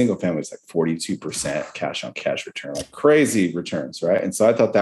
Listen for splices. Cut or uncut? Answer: uncut